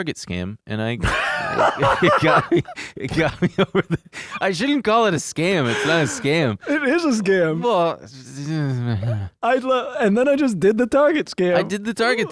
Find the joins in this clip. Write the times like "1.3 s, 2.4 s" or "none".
none